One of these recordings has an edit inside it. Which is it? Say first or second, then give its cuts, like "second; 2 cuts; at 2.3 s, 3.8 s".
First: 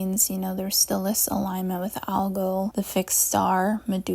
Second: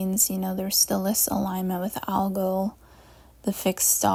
first; 1 cut; at 2.7 s